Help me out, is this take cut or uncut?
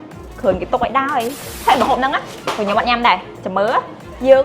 cut